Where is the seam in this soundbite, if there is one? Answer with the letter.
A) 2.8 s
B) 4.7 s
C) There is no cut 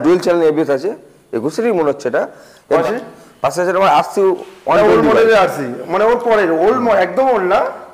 A